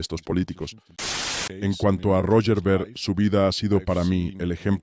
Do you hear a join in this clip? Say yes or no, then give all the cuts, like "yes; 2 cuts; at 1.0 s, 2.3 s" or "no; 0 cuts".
yes; 1 cut; at 1.0 s